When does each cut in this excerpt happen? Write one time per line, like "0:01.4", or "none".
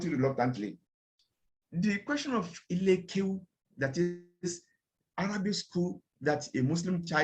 0:01.0